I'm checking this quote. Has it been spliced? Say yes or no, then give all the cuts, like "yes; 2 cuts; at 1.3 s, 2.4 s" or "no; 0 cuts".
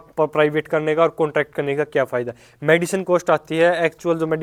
no; 0 cuts